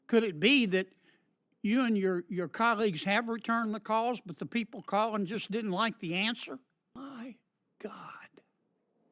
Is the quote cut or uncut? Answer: cut